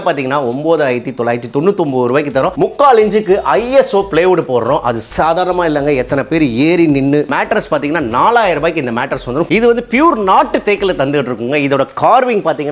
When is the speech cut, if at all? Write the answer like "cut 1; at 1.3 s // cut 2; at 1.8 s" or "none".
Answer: cut 1; at 2.5 s // cut 2; at 7.3 s // cut 3; at 9.5 s